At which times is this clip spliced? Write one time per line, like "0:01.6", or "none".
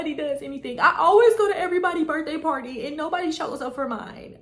none